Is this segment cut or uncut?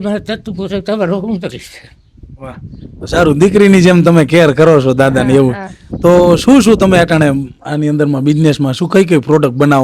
uncut